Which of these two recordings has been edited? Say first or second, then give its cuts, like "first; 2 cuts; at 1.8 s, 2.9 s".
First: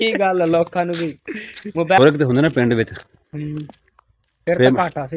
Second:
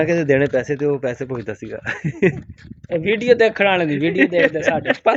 first; 1 cut; at 2.0 s